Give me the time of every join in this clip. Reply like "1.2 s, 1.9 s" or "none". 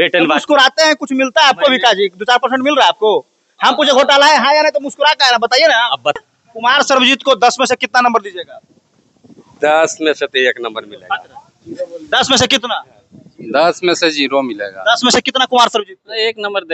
6.2 s